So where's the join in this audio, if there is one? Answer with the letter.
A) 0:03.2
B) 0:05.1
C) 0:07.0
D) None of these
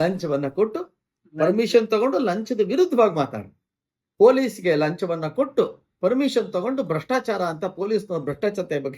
D